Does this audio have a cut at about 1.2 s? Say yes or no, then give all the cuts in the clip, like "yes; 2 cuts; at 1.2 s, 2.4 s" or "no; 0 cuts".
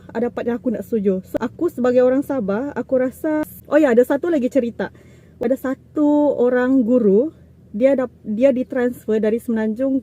yes; 3 cuts; at 1.2 s, 3.5 s, 5.4 s